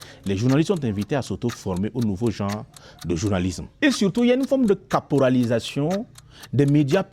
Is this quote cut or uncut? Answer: cut